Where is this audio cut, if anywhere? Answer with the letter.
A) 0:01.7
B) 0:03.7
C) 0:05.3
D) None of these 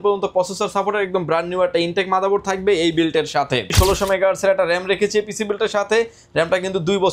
B